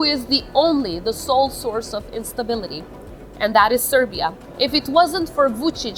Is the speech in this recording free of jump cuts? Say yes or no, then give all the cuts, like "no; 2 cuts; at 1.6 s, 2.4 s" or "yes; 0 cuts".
no; 1 cut; at 4.4 s